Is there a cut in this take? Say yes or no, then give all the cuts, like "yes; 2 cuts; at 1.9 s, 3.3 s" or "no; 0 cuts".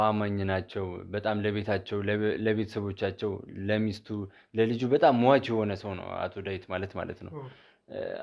no; 0 cuts